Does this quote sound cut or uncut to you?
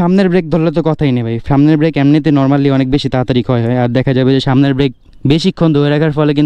uncut